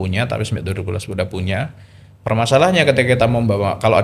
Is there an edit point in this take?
no; 0 cuts

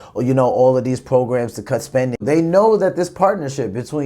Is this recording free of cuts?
no; 1 cut; at 2.2 s

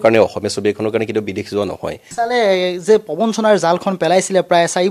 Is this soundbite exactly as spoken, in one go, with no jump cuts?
no; 1 cut; at 2.0 s

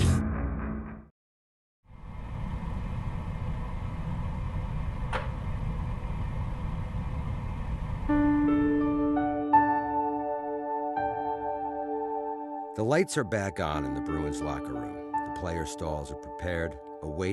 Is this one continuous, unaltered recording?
no; 1 cut; at 14.8 s

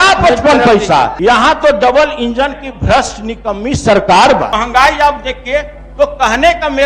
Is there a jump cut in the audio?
yes; 2 cuts; at 1.1 s, 4.5 s

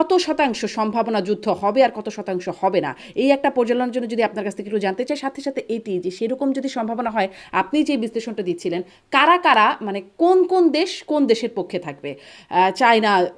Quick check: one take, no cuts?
yes; 0 cuts

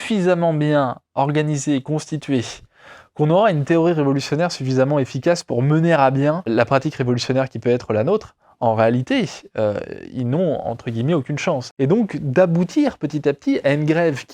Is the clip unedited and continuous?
no; 2 cuts; at 6.5 s, 11.7 s

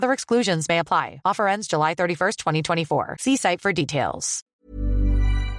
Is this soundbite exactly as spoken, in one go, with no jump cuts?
no; 1 cut; at 4.6 s

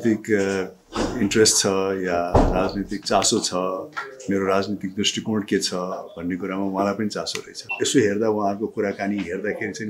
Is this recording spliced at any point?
yes; 1 cut; at 7.7 s

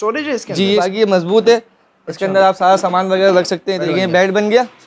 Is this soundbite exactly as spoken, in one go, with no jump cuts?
no; 2 cuts; at 0.9 s, 3.8 s

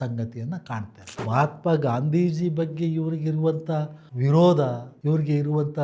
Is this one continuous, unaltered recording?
no; 1 cut; at 1.2 s

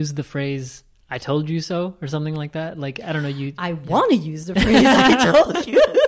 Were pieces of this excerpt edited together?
no; 0 cuts

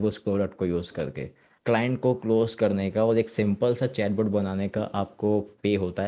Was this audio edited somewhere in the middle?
yes; 1 cut; at 1.5 s

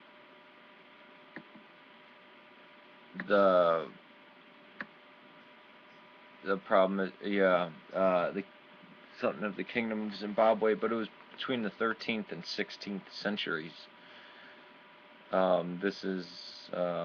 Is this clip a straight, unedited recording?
no; 1 cut; at 3.1 s

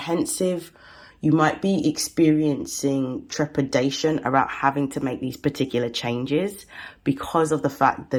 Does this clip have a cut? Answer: no; 0 cuts

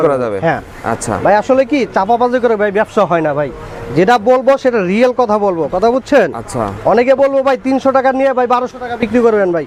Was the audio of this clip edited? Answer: no; 0 cuts

